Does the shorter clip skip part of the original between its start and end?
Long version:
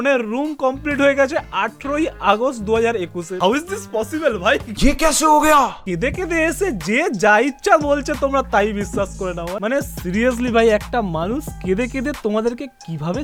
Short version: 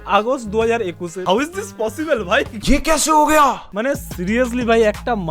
yes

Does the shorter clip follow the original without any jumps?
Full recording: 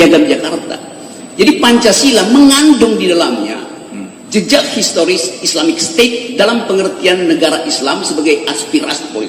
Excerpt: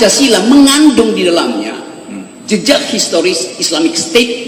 yes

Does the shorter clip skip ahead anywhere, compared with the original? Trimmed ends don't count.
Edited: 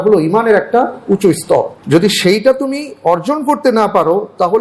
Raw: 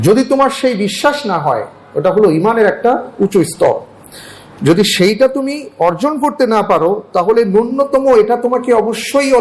yes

